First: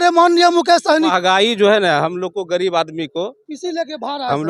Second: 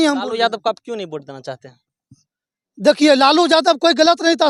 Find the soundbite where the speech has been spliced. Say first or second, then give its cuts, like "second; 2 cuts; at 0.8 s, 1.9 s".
first; 1 cut; at 1.1 s